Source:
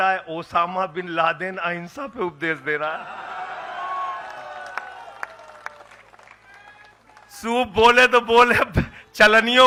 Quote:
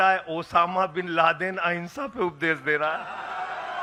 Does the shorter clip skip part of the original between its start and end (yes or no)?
no